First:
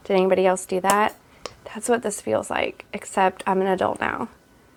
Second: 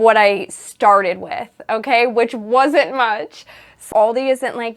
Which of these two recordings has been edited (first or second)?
second